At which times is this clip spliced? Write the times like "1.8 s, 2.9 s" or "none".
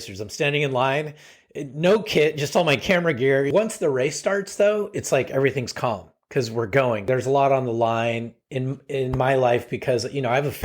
3.5 s, 7.0 s